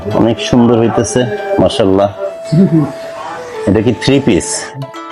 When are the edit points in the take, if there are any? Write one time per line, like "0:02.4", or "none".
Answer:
none